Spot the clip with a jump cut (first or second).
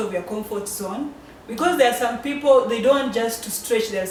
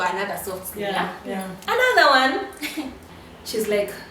second